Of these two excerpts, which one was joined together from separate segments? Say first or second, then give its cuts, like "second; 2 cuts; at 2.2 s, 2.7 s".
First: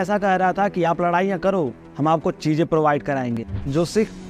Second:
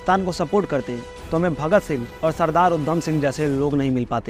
first; 1 cut; at 3.4 s